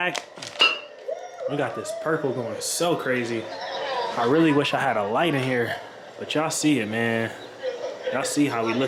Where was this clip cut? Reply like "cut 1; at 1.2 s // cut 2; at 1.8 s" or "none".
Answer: none